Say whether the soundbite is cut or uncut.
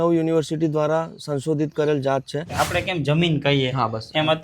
cut